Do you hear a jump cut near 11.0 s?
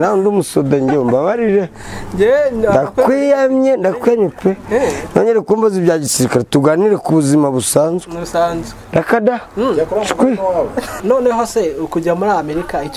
yes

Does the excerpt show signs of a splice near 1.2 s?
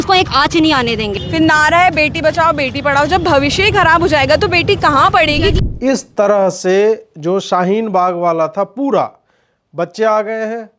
yes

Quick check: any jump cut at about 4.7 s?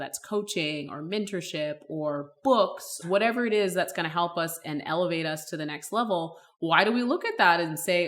no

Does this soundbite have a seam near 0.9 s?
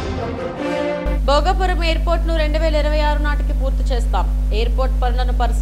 yes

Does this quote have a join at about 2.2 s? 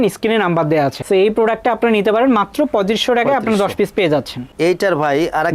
no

